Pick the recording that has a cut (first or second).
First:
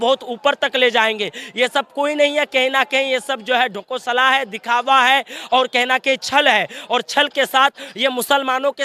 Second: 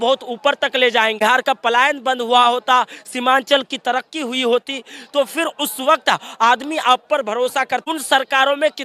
second